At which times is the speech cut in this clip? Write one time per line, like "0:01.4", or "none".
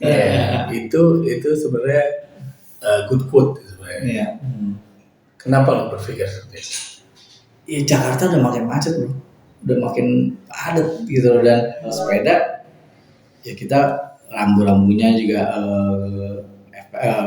0:12.0